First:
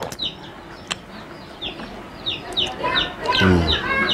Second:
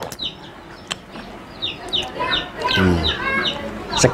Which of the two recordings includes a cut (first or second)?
second